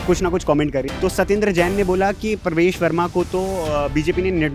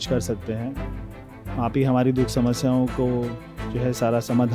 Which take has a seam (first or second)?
first